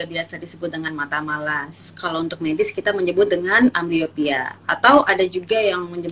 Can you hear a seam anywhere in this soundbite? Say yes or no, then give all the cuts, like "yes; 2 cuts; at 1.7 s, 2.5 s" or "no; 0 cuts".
no; 0 cuts